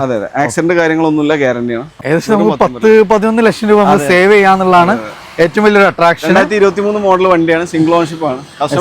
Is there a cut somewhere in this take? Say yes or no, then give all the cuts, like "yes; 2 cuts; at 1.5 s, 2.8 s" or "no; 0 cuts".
yes; 1 cut; at 1.9 s